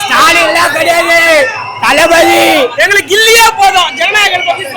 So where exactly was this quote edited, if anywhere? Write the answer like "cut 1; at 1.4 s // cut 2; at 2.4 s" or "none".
cut 1; at 2.7 s